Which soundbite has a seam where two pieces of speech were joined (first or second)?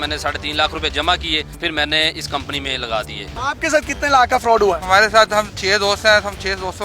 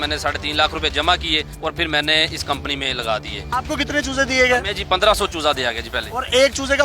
first